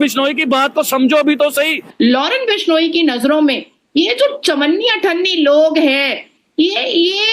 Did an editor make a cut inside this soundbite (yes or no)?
yes